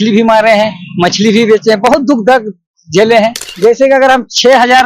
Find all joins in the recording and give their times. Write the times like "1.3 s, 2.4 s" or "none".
3.4 s